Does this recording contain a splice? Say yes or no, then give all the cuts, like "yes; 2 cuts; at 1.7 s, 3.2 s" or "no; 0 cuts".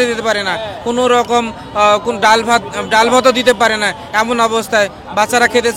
no; 0 cuts